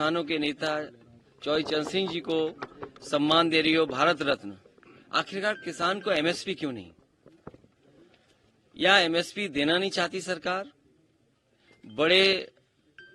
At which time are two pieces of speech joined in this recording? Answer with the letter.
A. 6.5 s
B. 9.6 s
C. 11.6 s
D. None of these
D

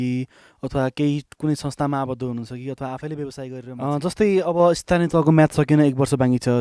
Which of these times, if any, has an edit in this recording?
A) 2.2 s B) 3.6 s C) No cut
B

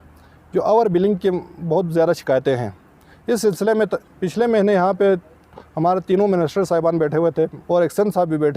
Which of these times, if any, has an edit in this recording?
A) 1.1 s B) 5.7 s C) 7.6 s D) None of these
C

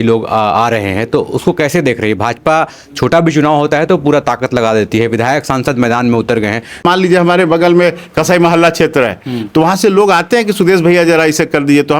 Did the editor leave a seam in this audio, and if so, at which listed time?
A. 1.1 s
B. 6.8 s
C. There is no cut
B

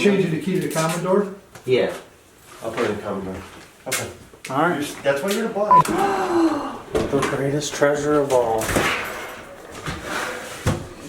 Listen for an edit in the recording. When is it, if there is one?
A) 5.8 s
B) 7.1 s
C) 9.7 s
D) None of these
A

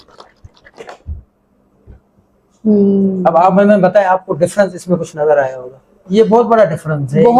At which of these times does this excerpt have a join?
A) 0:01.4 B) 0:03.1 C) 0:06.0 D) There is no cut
C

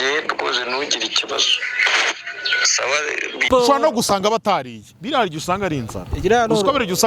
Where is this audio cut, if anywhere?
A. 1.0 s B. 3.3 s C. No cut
B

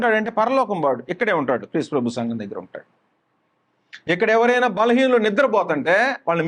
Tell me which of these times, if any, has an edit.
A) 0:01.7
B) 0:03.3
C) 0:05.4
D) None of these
D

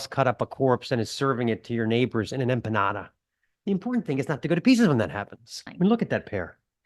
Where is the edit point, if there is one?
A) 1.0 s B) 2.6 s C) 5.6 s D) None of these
C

